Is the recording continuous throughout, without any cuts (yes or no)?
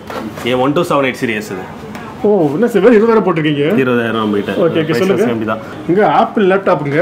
no